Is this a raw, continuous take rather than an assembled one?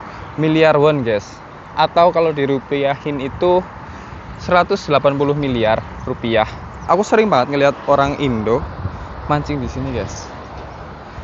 no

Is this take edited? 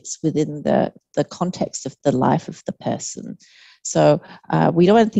no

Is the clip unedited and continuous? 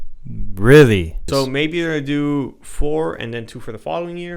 no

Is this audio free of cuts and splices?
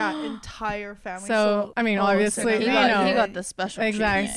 no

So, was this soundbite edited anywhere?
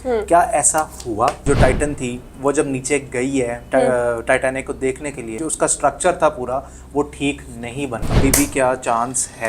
yes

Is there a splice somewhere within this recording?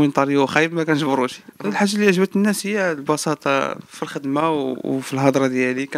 yes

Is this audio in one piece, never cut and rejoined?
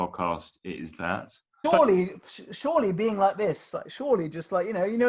no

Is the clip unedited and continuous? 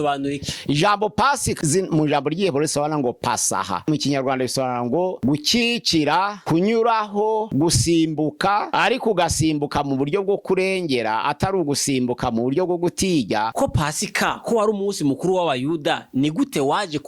no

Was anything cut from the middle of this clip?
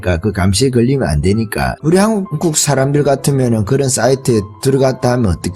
yes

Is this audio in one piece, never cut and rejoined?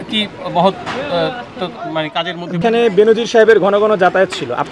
no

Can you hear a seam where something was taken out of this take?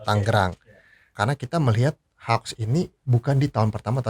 yes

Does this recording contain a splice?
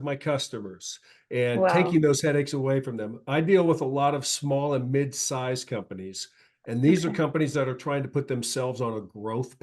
no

